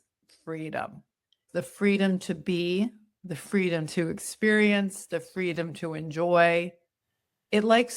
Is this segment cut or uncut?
cut